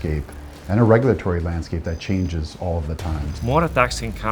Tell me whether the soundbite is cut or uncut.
cut